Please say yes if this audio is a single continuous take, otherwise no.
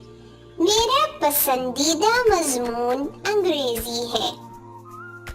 yes